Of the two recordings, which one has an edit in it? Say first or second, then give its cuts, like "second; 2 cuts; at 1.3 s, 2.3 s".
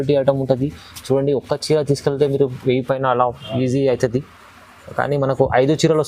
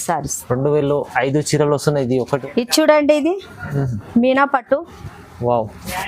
second; 1 cut; at 2.4 s